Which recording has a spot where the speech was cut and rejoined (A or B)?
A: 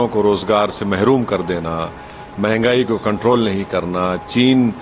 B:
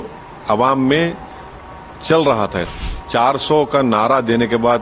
B